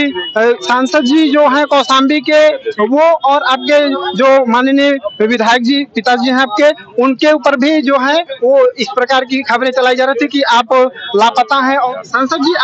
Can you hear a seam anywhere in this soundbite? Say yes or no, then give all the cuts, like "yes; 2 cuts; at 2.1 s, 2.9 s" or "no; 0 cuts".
yes; 1 cut; at 11.7 s